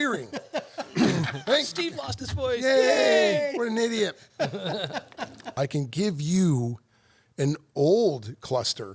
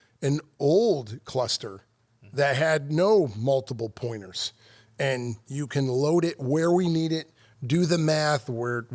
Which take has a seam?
first; 1 cut; at 5.4 s

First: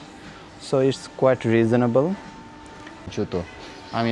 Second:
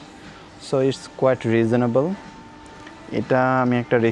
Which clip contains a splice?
first; 1 cut; at 3.1 s

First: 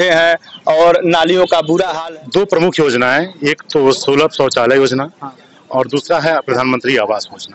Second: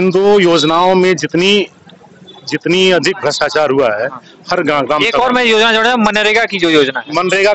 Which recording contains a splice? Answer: first; 1 cut; at 2.0 s

